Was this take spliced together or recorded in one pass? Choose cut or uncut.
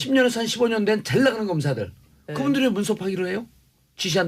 uncut